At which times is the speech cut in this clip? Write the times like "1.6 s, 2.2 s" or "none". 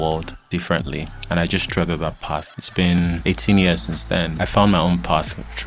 1.1 s, 2.8 s, 4.3 s